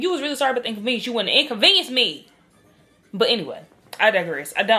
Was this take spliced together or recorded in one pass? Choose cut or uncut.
uncut